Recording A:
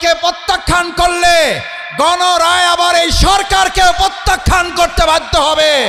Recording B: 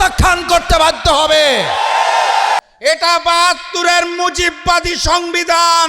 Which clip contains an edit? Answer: B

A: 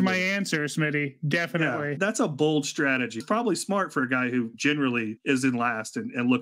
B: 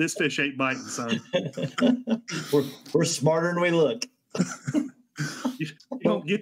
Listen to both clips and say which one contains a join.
A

